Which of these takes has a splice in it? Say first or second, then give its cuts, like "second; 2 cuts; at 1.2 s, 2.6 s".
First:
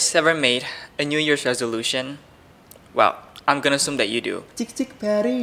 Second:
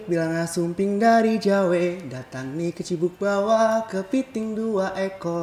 first; 1 cut; at 4.5 s